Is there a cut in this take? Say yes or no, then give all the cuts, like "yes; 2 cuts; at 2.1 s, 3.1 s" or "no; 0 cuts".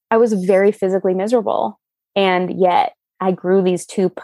no; 0 cuts